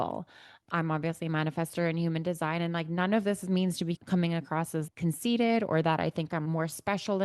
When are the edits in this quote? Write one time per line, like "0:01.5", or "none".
none